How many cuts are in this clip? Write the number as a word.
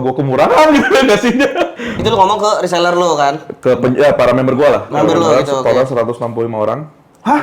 one